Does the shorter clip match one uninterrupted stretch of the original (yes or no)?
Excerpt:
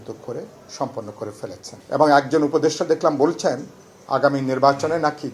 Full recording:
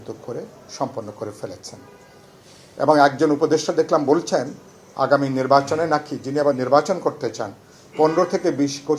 no